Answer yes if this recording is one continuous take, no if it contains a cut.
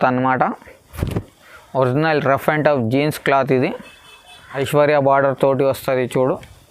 no